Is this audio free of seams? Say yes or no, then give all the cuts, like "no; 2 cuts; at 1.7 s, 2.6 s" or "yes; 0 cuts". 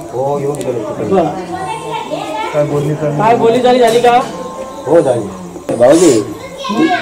no; 1 cut; at 5.7 s